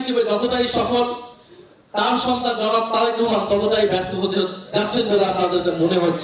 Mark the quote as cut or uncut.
uncut